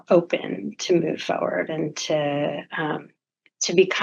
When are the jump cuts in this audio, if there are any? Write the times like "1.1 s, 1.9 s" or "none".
none